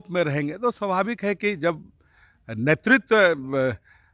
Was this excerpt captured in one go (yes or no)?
yes